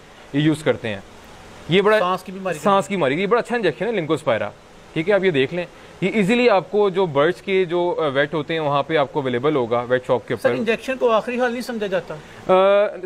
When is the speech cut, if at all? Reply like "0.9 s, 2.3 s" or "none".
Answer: none